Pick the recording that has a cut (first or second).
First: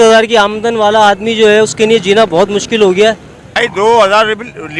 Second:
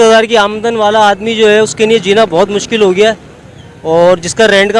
first